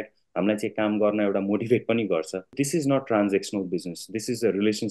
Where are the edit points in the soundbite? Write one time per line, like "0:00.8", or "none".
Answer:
0:02.5